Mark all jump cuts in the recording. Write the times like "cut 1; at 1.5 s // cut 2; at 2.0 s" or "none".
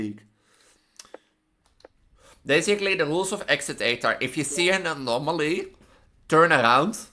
cut 1; at 2.1 s